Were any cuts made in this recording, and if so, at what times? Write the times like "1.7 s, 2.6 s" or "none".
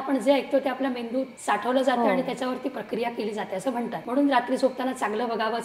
1.4 s, 4.0 s

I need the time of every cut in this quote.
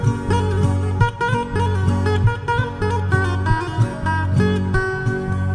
none

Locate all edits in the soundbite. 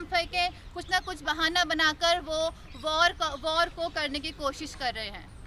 none

